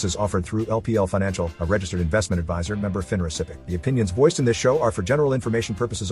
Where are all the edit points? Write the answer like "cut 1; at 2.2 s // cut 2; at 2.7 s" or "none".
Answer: cut 1; at 3.6 s